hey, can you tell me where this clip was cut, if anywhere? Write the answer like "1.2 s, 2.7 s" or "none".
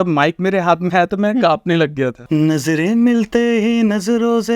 2.2 s